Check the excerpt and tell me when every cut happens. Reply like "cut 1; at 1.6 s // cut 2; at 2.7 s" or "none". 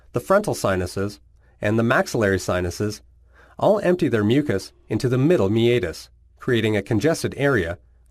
cut 1; at 6.7 s